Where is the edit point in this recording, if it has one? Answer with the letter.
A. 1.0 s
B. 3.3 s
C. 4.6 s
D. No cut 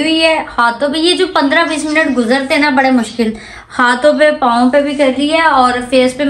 D